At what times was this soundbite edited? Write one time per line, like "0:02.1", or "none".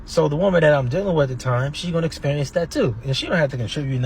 0:03.1